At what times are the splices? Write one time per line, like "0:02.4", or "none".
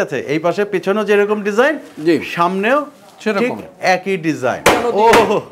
0:04.6